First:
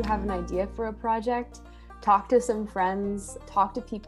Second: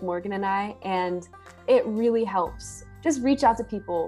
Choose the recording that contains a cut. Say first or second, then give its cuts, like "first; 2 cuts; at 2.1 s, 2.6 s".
second; 1 cut; at 1.6 s